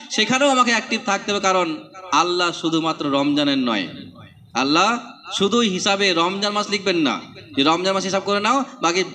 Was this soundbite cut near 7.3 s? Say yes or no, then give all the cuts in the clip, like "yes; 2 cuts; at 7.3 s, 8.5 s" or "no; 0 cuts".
no; 0 cuts